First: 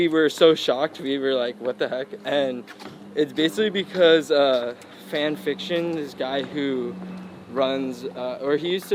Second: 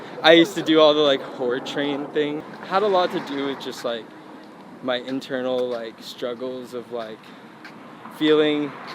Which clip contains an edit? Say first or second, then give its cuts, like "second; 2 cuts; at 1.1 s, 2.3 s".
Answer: second; 1 cut; at 2.4 s